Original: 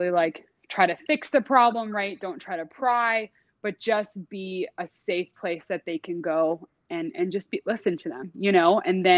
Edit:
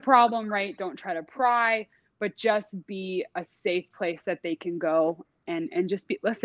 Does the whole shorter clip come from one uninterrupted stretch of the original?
yes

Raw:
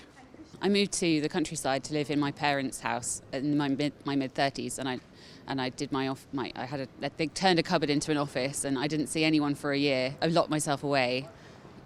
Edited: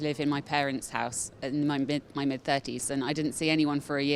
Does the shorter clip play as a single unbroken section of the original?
no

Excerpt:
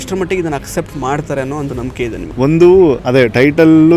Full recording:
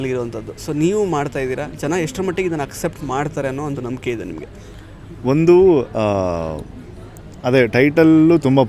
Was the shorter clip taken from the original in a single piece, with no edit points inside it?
no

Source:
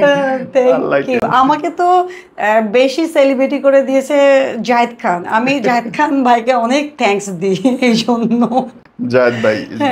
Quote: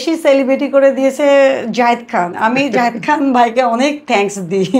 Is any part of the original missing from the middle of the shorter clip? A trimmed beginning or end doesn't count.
no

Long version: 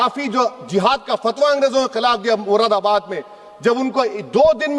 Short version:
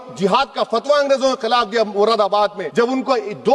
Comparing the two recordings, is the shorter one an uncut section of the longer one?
no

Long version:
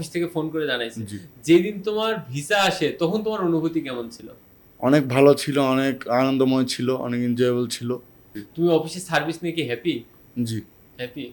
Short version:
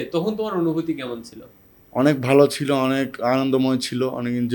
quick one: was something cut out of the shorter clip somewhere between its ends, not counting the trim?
no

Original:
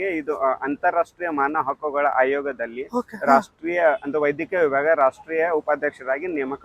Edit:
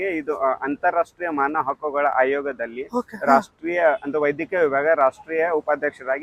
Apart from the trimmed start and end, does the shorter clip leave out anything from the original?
no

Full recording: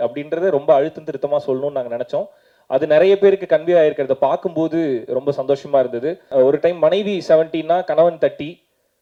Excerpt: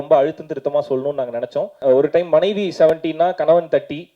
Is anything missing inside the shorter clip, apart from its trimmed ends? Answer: yes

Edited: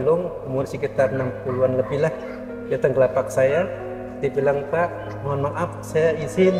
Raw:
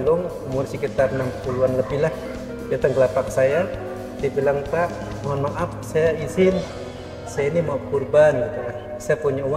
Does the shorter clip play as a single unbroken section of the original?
yes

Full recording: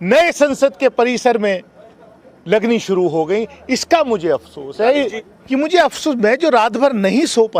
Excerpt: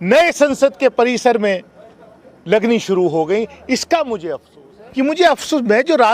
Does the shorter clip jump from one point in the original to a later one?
yes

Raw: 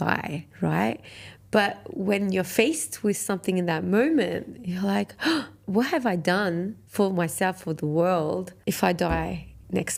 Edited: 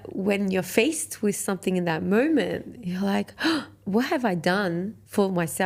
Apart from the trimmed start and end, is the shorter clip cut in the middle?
no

